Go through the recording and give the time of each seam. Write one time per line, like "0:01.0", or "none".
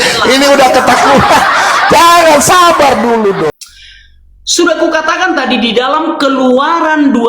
0:03.5